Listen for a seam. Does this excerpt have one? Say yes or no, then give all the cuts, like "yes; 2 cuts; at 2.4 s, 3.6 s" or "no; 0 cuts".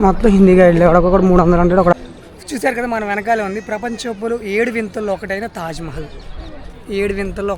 yes; 1 cut; at 1.9 s